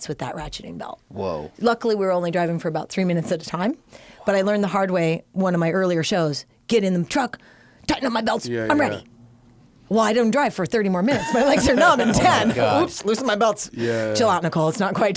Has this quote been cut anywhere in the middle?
no; 0 cuts

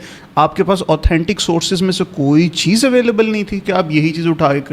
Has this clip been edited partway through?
no; 0 cuts

